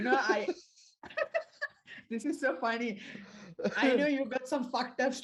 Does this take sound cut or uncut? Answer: uncut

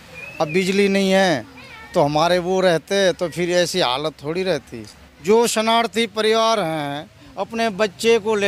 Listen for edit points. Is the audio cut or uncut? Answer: uncut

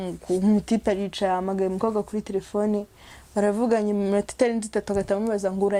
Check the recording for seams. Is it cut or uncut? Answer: uncut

